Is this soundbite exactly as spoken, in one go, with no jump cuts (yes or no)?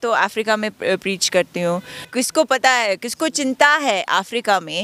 no